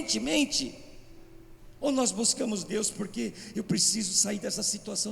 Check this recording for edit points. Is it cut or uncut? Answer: uncut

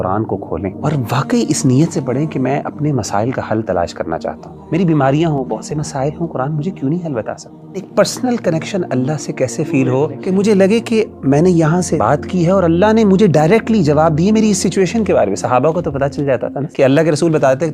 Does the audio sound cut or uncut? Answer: cut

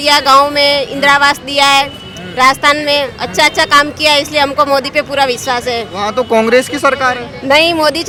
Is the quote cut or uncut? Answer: uncut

